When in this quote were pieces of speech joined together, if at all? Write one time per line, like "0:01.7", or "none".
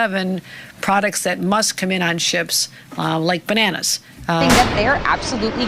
0:04.5

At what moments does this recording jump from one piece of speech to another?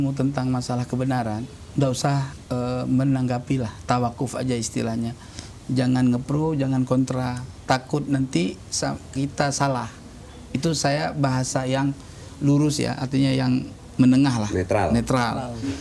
0:01.6
0:02.3

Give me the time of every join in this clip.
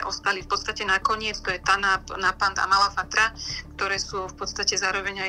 none

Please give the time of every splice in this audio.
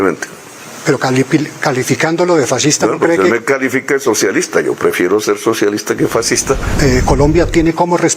0:06.7

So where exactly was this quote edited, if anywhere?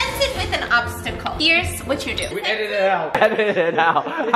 0:01.4
0:02.3
0:03.1

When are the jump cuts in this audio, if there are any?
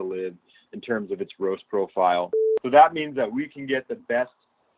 0:02.4

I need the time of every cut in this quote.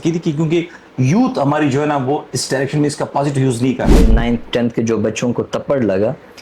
0:04.1

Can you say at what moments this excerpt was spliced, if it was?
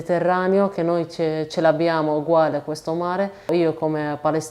0:03.5

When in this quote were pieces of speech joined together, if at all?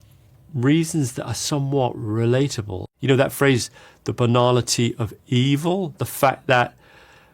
0:02.8

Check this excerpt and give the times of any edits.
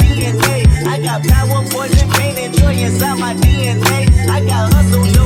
none

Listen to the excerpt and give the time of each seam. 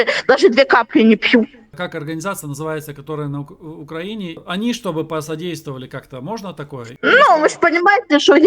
0:01.7
0:06.9

